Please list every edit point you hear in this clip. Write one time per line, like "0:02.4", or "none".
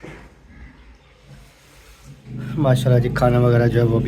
0:02.2